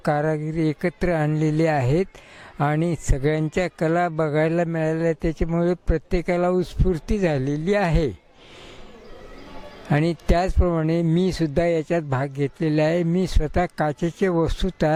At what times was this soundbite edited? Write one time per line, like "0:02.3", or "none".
none